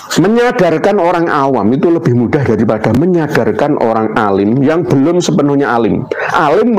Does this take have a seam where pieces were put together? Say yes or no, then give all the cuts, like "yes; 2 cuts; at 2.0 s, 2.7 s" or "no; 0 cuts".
no; 0 cuts